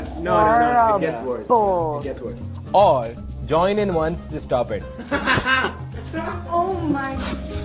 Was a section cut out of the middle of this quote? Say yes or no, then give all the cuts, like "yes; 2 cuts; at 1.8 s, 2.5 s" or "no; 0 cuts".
no; 0 cuts